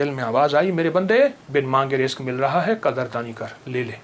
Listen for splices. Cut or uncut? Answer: cut